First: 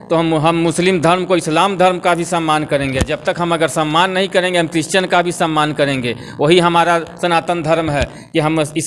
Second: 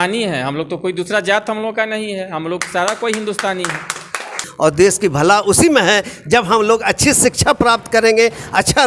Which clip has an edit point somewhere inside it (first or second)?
second